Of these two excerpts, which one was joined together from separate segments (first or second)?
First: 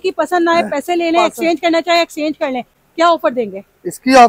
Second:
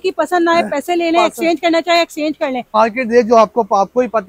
second